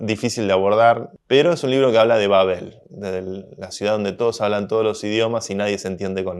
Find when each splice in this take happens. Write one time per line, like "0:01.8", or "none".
0:01.1